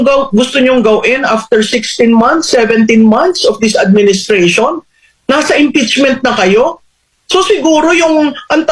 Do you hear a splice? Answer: no; 0 cuts

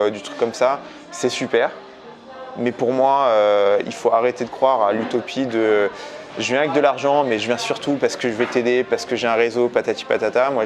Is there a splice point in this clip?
no; 0 cuts

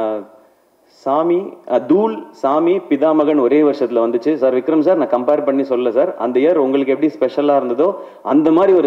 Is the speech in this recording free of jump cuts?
yes; 0 cuts

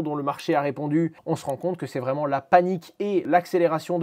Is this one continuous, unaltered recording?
no; 2 cuts; at 1.2 s, 3.2 s

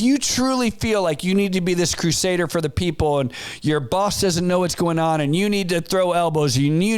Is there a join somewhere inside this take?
no; 0 cuts

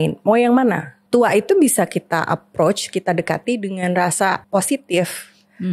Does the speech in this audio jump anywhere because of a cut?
yes; 2 cuts; at 0.9 s, 4.4 s

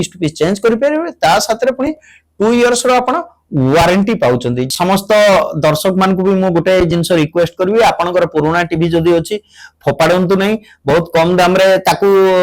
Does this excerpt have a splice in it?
yes; 1 cut; at 4.6 s

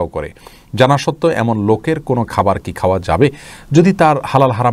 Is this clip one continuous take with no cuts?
yes; 0 cuts

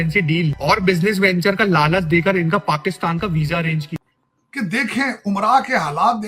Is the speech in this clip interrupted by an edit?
yes; 1 cut; at 3.9 s

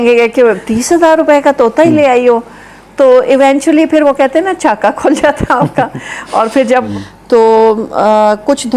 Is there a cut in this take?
yes; 1 cut; at 6.8 s

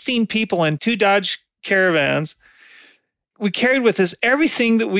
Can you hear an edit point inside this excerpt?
no; 0 cuts

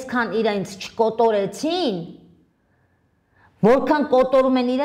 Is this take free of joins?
yes; 0 cuts

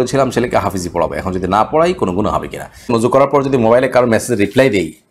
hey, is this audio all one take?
no; 1 cut; at 2.9 s

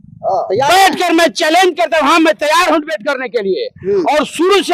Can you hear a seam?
no; 0 cuts

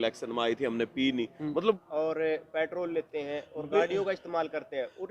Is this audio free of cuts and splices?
no; 1 cut; at 1.8 s

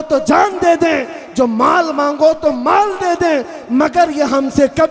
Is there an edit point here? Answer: no; 0 cuts

